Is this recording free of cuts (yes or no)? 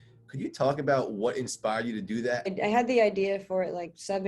no